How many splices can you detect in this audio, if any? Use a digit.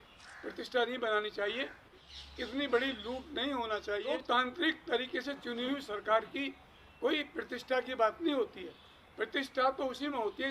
2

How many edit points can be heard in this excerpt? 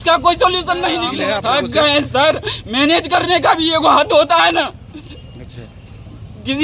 1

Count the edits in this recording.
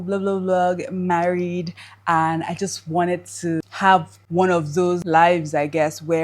2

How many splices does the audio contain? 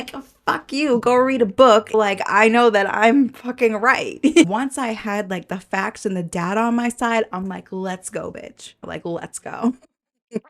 3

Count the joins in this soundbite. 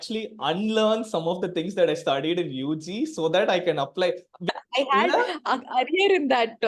1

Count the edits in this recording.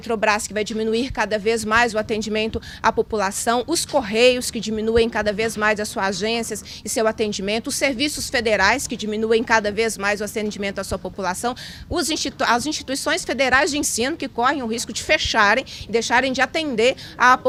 0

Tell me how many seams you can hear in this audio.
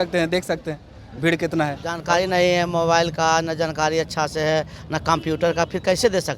1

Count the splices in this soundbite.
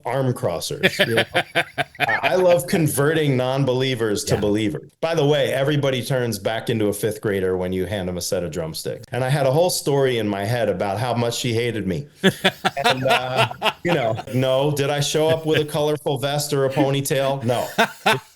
3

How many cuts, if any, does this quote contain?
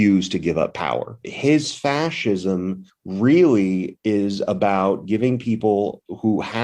1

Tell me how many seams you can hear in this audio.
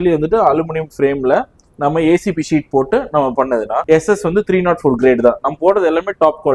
1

